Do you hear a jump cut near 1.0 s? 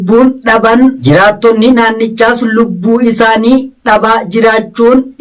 yes; 1 cut; at 1.0 s

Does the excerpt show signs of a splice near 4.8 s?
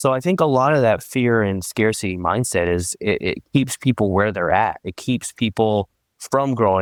no; 0 cuts

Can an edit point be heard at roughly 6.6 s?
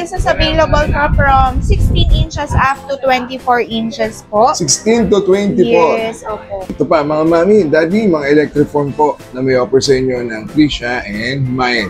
yes; 1 cut; at 6.6 s

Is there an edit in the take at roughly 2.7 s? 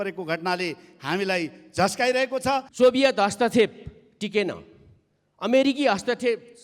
yes; 1 cut; at 2.7 s

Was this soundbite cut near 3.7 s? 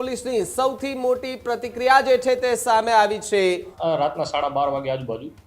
yes; 1 cut; at 3.7 s

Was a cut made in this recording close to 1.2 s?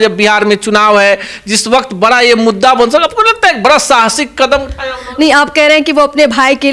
no; 0 cuts

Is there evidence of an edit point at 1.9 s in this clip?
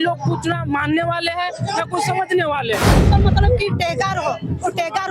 no; 1 cut; at 3.1 s

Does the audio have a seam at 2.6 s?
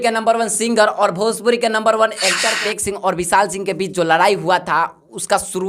yes; 1 cut; at 2.6 s

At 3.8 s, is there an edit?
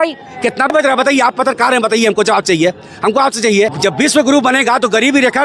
yes; 2 cuts; at 0.7 s, 3.8 s

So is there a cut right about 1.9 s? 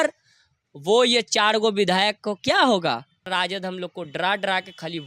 no; 1 cut; at 3.3 s

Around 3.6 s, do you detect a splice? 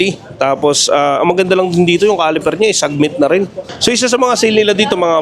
yes; 1 cut; at 3.6 s

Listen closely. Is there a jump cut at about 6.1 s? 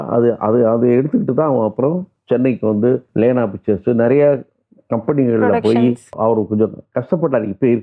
yes; 2 cuts; at 3.1 s, 6.1 s

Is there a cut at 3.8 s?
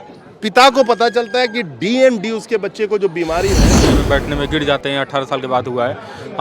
yes; 1 cut; at 3.8 s

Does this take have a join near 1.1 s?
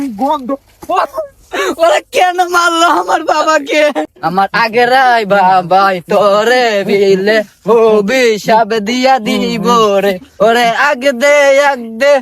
yes; 1 cut; at 1.1 s

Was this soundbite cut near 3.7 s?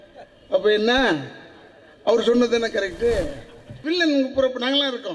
yes; 1 cut; at 3.7 s

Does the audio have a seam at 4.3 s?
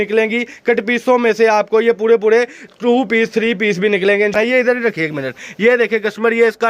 no; 0 cuts

